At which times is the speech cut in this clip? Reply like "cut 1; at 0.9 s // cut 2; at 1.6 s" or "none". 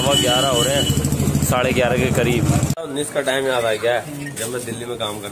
cut 1; at 2.8 s